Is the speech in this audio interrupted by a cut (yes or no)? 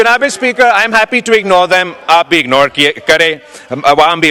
no